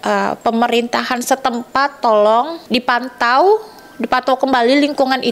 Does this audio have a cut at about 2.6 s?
yes; 1 cut; at 2.6 s

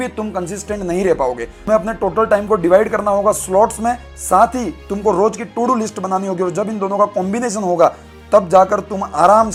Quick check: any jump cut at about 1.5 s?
no; 0 cuts

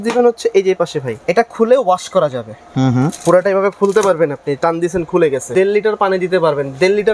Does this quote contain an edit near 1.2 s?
yes; 2 cuts; at 1.2 s, 5.5 s

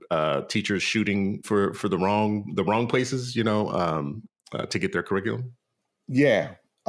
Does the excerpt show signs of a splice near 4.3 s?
no; 1 cut; at 1.4 s

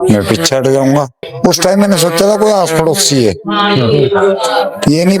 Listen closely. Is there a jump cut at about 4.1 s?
no; 1 cut; at 1.3 s

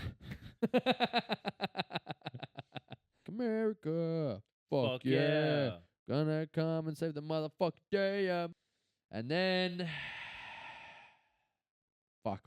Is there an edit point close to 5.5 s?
no; 2 cuts; at 3.3 s, 8.5 s

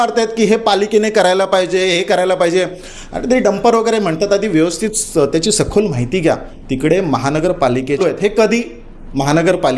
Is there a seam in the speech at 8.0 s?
yes; 1 cut; at 8.0 s

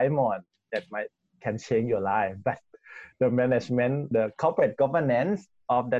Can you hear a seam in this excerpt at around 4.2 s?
yes; 1 cut; at 4.2 s

